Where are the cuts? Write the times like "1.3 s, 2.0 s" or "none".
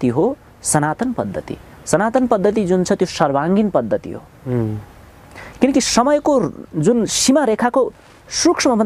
none